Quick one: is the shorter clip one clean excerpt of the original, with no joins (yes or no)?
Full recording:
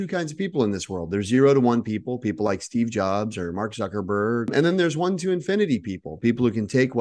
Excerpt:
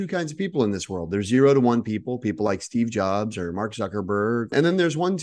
yes